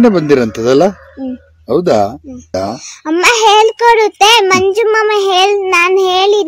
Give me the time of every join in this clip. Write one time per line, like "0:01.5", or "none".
0:02.5